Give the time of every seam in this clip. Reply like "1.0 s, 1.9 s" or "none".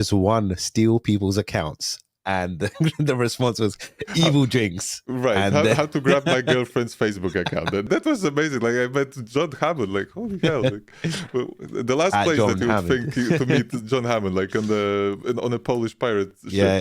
7.8 s